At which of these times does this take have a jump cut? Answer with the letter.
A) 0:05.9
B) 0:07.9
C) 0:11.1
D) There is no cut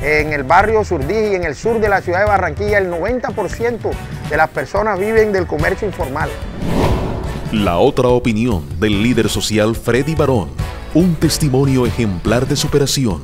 B